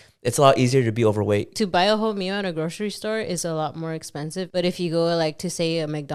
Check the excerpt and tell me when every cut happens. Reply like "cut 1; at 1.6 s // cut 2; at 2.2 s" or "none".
none